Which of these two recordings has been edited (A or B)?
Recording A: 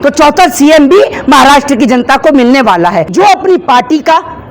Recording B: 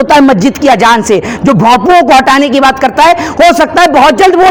A